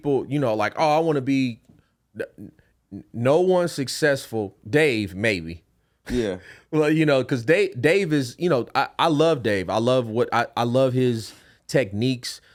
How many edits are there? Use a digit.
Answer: 0